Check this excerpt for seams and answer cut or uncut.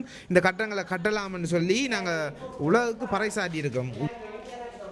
uncut